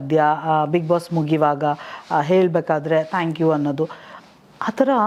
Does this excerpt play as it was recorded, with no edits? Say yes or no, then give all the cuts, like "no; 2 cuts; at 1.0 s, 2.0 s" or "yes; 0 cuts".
yes; 0 cuts